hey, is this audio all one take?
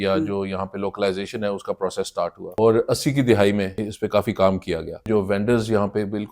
no; 3 cuts; at 2.4 s, 3.8 s, 5.0 s

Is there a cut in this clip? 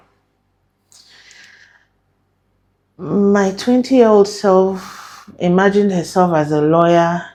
no; 0 cuts

